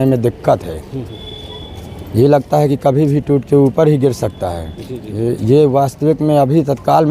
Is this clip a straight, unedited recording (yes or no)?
yes